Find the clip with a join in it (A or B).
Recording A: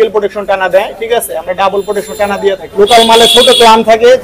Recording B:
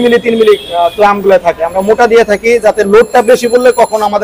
A